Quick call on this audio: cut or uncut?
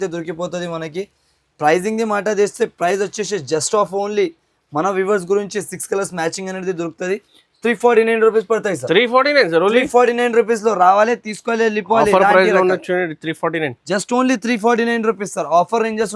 uncut